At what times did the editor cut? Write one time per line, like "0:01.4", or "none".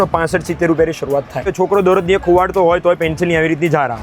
0:01.5